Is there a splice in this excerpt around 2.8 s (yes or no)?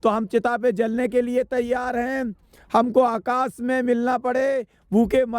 no